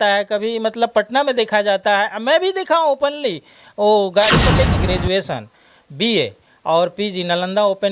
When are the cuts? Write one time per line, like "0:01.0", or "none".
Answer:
0:04.8